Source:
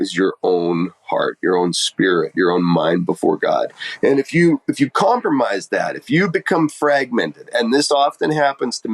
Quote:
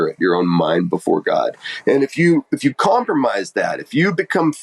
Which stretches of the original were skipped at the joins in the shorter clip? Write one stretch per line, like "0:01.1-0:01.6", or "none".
none

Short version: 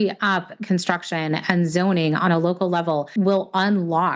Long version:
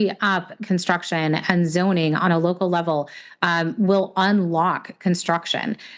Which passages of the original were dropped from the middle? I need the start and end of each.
0:03.1-0:03.7

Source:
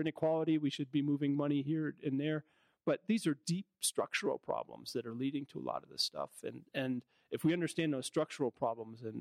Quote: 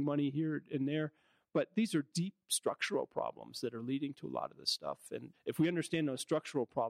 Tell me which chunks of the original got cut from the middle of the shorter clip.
0:06.6-0:07.2

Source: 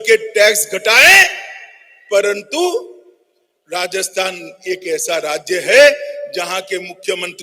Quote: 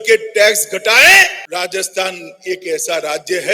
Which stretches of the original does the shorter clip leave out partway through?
0:01.4-0:03.6

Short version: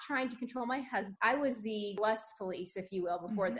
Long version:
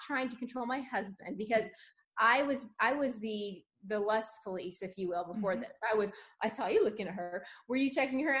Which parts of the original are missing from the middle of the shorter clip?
0:01.1-0:02.7
0:03.6-0:04.0

